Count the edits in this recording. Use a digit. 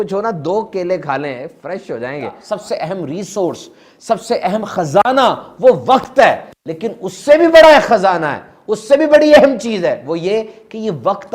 1